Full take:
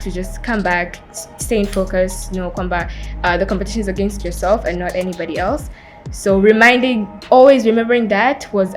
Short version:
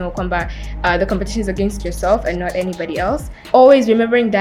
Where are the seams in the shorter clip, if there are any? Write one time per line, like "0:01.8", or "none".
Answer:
0:03.3